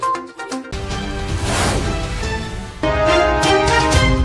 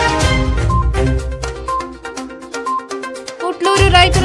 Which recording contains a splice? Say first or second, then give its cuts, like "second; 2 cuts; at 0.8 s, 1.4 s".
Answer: second; 1 cut; at 2.7 s